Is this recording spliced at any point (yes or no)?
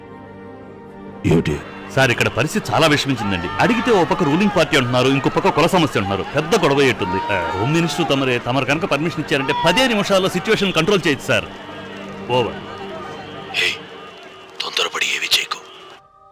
no